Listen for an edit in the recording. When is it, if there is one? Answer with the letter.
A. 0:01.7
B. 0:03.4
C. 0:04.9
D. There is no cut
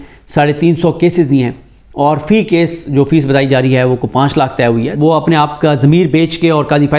C